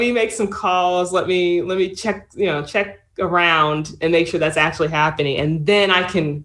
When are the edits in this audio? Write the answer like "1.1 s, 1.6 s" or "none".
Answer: none